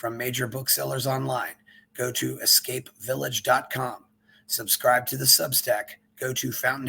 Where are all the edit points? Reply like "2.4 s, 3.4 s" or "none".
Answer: none